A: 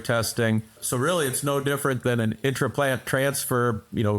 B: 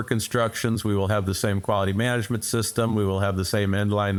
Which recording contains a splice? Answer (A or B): A